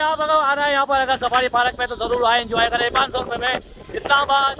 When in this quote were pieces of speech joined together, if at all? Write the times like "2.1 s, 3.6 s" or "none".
none